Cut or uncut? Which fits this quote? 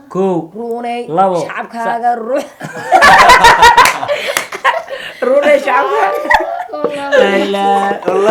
uncut